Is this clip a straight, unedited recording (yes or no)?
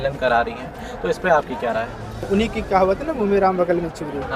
no